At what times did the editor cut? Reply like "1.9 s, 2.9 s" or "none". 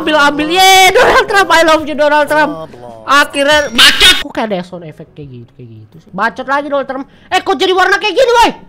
4.1 s